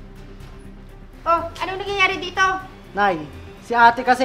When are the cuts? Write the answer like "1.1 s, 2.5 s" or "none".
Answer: 2.8 s